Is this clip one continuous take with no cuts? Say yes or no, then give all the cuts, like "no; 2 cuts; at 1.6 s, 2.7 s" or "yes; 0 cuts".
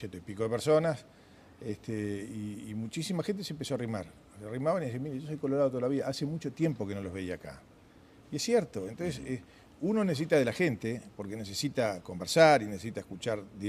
yes; 0 cuts